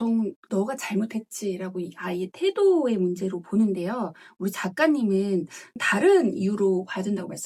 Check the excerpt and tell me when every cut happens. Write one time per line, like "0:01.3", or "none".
none